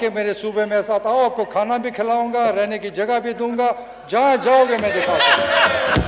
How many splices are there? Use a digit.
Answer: 0